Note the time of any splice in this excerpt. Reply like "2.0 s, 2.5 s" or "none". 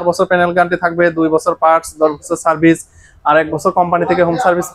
none